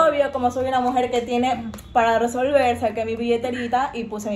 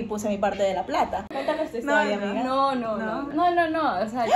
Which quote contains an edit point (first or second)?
second